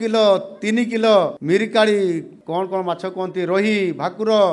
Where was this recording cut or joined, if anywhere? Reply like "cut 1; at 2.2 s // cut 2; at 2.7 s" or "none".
cut 1; at 1.4 s // cut 2; at 2.3 s